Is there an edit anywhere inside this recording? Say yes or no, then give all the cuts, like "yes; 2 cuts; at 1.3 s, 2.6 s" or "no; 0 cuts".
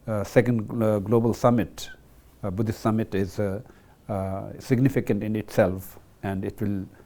no; 0 cuts